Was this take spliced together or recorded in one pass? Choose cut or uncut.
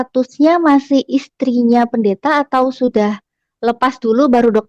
uncut